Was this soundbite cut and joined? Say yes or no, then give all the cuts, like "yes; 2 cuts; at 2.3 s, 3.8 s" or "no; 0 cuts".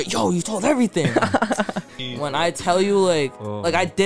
yes; 1 cut; at 1.9 s